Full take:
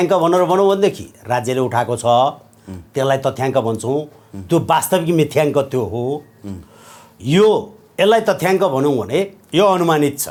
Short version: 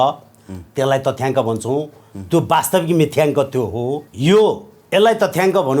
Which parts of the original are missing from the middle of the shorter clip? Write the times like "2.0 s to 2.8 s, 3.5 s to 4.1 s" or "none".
6.3 s to 7.1 s